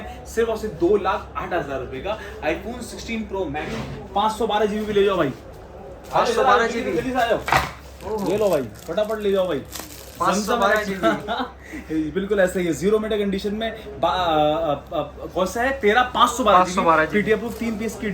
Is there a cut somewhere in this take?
yes; 1 cut; at 3.8 s

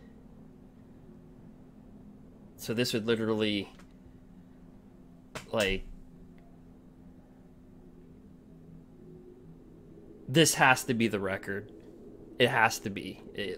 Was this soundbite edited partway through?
no; 0 cuts

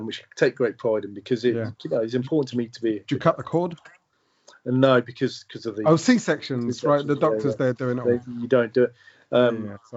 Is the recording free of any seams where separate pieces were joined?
yes; 0 cuts

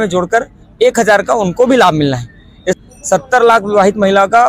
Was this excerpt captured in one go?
no; 1 cut; at 2.8 s

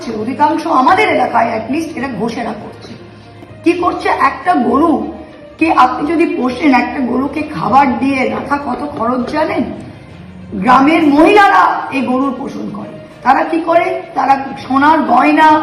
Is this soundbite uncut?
yes; 0 cuts

